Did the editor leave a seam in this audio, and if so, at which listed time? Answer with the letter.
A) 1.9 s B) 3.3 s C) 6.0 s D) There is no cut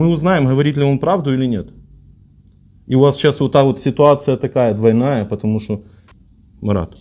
C